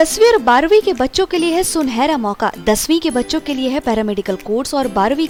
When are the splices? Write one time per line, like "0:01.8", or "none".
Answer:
none